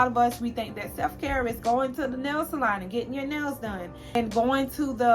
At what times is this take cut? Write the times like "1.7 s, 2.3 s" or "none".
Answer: 4.2 s